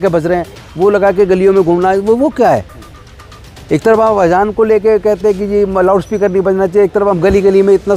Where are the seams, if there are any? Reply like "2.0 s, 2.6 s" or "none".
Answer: none